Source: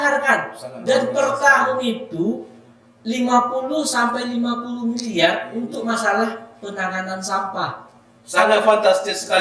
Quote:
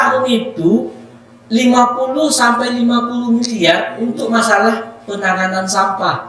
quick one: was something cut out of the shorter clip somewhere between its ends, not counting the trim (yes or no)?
no